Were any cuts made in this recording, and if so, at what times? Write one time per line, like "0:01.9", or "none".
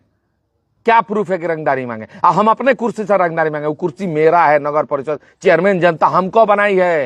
none